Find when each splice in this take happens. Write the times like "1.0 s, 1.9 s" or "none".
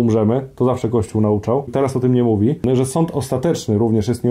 1.7 s, 2.6 s